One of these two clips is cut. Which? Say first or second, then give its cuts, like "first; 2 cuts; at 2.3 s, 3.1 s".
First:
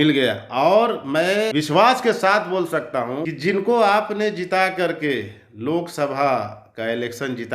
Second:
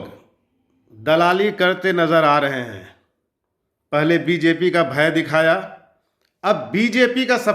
first; 2 cuts; at 1.5 s, 3.3 s